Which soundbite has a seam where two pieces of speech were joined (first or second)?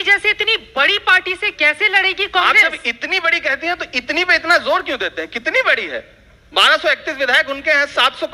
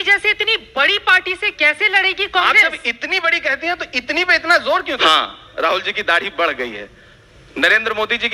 second